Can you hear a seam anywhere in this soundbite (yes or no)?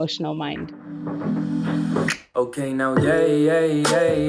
yes